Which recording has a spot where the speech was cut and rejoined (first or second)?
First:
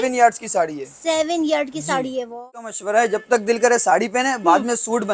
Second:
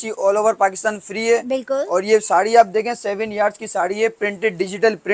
first